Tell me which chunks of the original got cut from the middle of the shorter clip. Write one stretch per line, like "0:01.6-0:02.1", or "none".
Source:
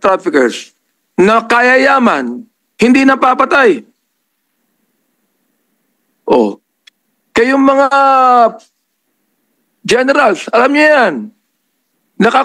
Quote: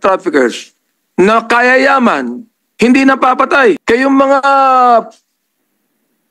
0:03.8-0:07.3